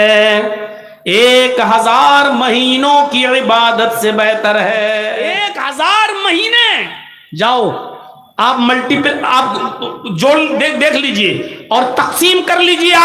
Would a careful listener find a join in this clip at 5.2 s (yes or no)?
yes